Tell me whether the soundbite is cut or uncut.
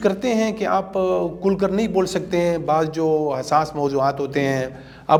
uncut